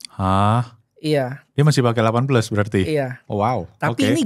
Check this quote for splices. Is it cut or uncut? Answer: uncut